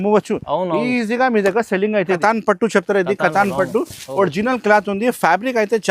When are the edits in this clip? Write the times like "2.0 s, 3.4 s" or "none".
2.2 s

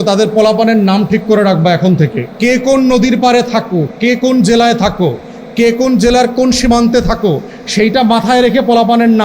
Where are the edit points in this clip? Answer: 2.2 s

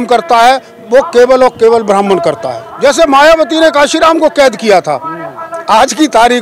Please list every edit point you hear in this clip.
2.6 s

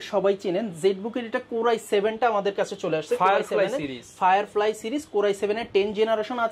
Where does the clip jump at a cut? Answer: none

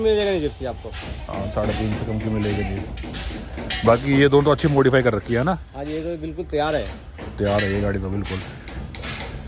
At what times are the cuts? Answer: none

